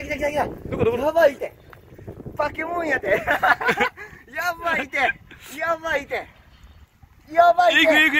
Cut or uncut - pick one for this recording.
uncut